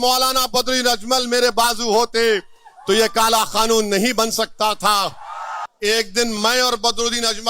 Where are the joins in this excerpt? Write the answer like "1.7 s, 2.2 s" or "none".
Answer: 5.6 s